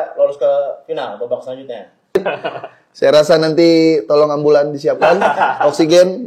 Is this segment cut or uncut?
cut